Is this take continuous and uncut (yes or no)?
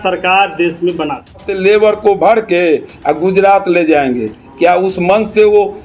no